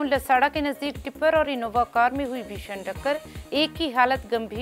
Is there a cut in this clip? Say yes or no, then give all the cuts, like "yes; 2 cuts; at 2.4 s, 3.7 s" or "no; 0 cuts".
no; 0 cuts